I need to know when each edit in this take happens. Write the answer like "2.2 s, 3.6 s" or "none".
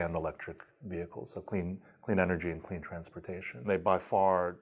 none